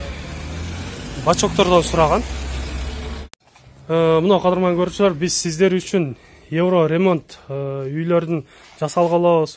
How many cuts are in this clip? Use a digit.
1